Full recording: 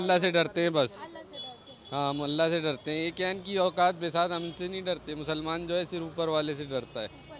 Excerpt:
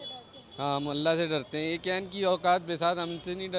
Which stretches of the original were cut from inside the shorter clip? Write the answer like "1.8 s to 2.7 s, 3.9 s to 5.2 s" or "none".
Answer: none

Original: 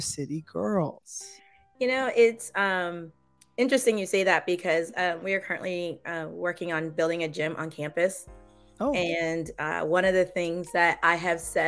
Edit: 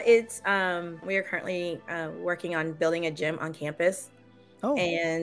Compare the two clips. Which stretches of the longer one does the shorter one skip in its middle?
3.1 s to 5.2 s

